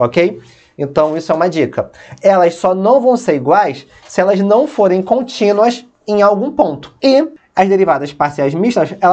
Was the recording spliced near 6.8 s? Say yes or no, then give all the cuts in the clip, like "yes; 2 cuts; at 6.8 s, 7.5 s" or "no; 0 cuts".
yes; 2 cuts; at 6.8 s, 7.4 s